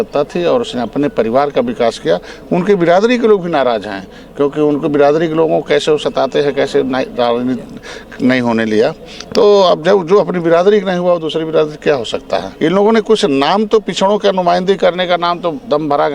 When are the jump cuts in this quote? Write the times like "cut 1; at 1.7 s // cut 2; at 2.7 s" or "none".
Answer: cut 1; at 12.5 s

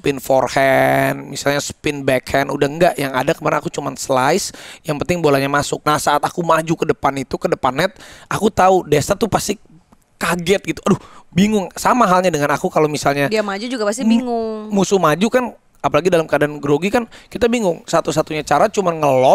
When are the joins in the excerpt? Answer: cut 1; at 5.8 s

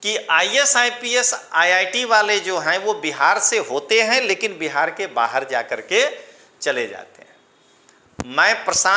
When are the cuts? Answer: none

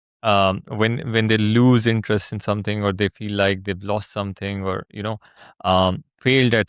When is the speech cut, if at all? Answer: none

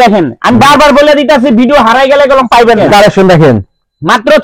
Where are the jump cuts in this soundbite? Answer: cut 1; at 2.8 s

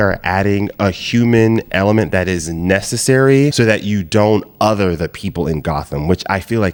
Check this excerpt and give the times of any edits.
none

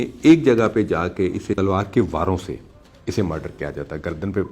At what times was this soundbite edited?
cut 1; at 1.6 s

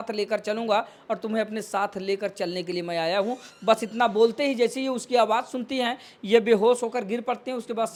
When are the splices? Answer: none

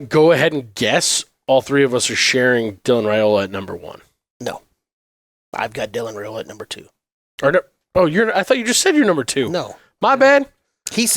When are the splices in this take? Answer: none

